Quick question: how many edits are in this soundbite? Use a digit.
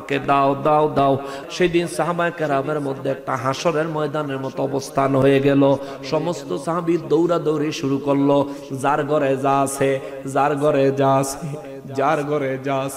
1